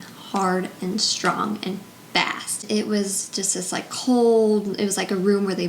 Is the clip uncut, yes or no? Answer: no